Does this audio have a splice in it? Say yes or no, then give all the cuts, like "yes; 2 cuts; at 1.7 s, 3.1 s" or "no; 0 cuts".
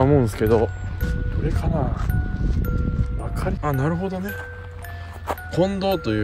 yes; 2 cuts; at 1.0 s, 3.6 s